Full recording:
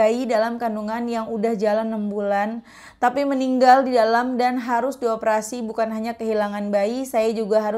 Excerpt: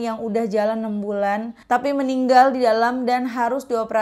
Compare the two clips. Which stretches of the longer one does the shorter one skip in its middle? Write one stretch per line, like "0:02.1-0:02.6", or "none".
0:02.6-0:02.8